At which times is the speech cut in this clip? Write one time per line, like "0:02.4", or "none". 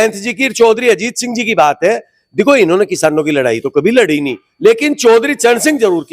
none